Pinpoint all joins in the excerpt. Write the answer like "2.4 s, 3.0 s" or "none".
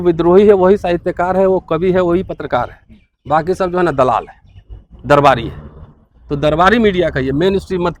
none